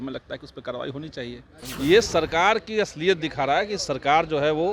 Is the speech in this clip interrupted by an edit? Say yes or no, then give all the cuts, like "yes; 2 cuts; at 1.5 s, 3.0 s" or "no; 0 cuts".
yes; 1 cut; at 1.6 s